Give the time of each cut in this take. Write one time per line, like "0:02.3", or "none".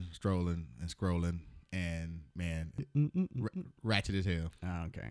0:02.9

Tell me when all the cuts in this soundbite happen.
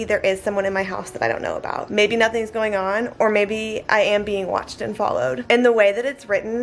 none

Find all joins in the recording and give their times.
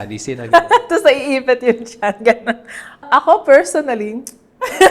0:03.1

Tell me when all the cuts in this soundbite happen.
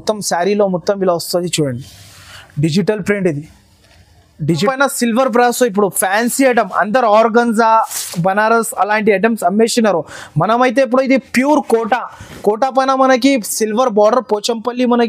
0:04.7

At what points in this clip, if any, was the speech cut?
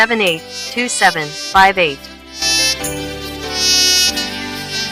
none

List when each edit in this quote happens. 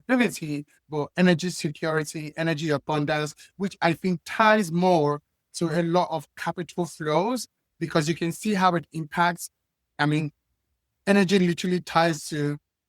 none

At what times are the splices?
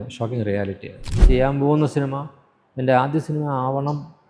0:01.1

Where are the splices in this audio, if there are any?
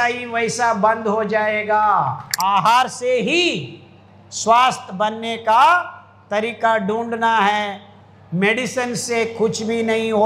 0:02.3

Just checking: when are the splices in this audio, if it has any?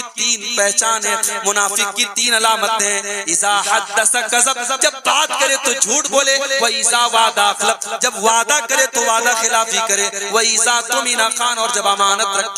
none

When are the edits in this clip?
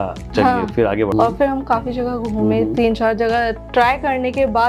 0:01.1

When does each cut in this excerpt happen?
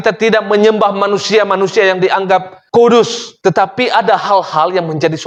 none

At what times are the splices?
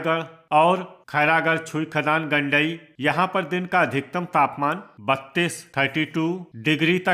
0:01.0
0:02.9

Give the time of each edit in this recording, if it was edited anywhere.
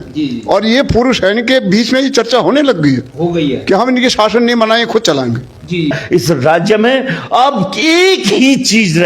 0:05.9

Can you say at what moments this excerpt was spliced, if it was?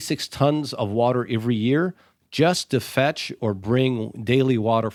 none

